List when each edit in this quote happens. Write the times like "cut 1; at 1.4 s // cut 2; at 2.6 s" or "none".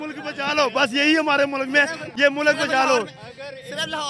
none